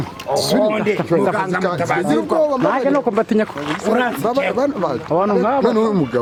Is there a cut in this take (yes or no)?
no